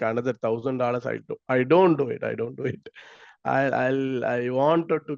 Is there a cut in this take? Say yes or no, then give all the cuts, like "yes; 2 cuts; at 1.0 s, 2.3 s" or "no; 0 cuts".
no; 0 cuts